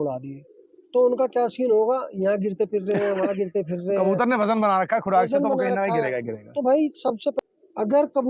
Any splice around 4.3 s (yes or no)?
no